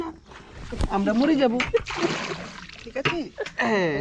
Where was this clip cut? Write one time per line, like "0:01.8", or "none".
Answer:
none